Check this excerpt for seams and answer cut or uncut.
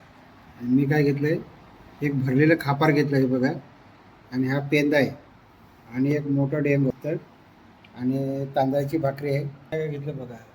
cut